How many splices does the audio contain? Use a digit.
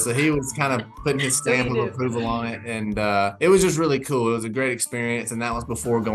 0